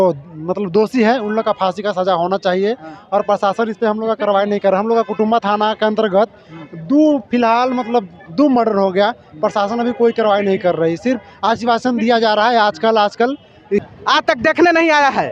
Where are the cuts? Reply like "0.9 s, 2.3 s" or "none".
13.8 s